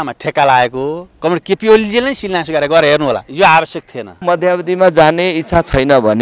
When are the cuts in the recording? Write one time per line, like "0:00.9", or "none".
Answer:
0:03.3
0:04.1

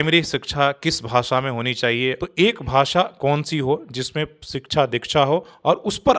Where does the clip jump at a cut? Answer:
0:02.2

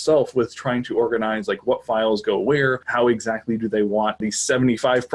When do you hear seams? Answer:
0:02.8
0:04.2

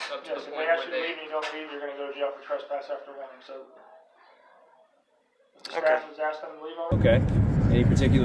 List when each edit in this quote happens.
0:06.9

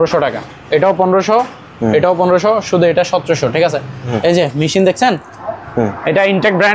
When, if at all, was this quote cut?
0:04.1

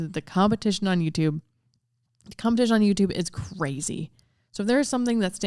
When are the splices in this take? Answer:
none

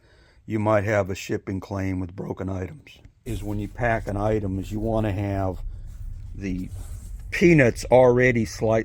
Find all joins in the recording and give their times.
0:03.3

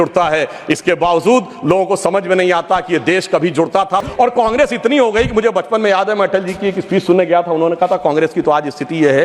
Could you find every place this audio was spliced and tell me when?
0:04.1

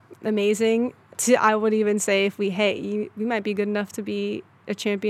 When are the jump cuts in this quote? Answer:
0:01.1

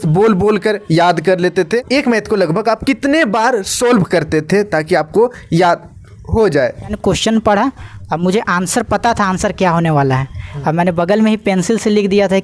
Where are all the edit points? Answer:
0:01.8
0:07.0

